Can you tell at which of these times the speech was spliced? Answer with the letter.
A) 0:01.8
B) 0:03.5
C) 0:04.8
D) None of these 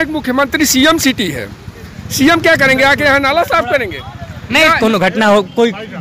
C